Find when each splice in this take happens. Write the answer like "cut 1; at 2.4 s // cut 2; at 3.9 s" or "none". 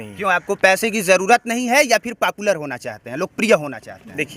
none